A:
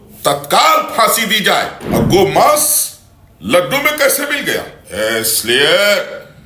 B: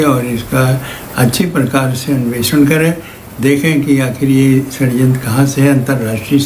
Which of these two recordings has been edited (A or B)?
A